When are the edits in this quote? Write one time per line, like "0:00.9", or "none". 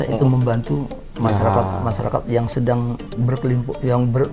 none